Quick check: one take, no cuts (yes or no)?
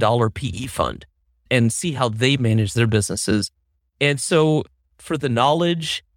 yes